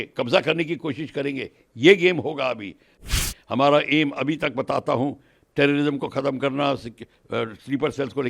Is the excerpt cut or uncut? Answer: cut